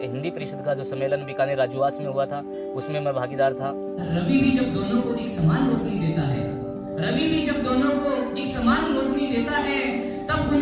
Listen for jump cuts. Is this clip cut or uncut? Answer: uncut